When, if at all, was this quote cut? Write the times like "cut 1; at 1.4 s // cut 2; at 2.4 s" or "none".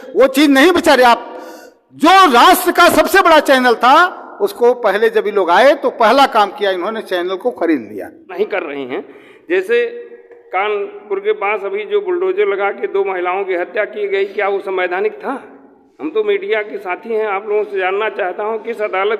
cut 1; at 8.3 s